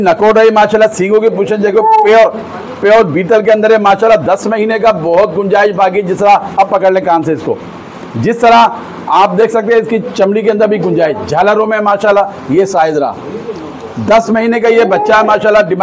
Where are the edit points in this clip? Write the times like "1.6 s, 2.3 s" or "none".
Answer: none

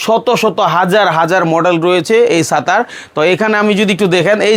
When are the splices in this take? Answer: none

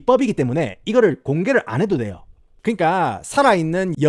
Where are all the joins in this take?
2.4 s

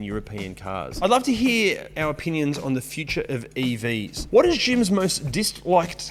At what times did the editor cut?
0.9 s, 4.1 s

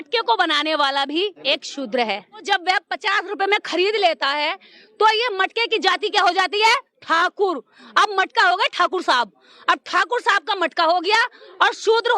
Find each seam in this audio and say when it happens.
1.4 s, 2.4 s

